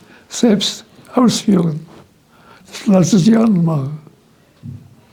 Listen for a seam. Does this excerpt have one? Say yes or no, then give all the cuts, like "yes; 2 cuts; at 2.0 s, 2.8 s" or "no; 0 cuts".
no; 0 cuts